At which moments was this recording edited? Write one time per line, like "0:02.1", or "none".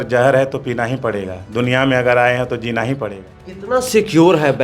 0:03.5